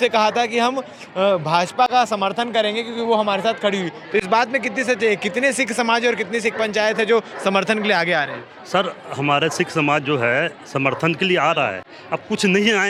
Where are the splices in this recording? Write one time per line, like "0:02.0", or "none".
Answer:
none